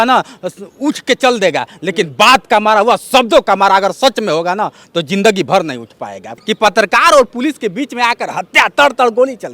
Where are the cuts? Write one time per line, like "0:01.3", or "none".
0:06.4